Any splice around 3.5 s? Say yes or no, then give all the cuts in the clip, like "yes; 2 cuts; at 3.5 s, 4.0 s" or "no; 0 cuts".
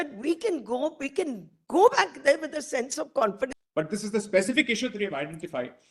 yes; 1 cut; at 3.5 s